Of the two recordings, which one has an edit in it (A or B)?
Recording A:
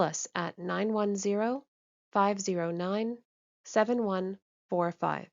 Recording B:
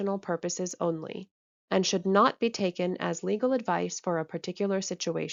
A